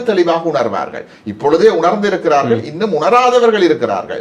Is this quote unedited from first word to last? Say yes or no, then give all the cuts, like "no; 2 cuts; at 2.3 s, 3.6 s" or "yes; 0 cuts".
yes; 0 cuts